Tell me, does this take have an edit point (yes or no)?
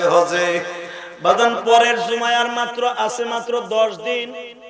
no